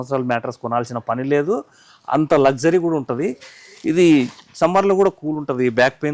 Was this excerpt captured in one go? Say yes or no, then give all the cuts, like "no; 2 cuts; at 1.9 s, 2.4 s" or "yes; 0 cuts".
yes; 0 cuts